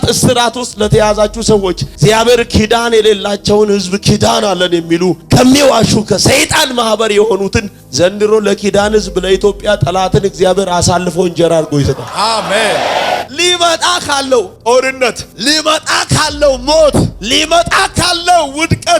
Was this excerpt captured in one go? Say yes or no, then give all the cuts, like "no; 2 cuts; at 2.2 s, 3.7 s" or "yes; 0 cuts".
no; 1 cut; at 13.3 s